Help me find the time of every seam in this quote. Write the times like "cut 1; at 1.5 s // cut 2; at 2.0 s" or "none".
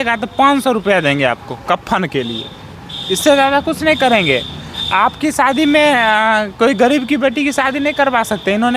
none